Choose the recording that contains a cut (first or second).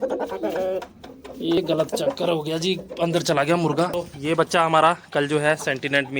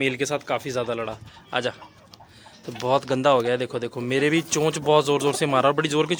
first